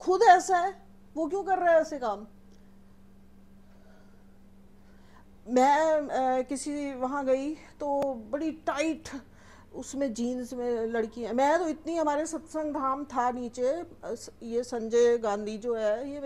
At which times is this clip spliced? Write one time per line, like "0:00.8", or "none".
none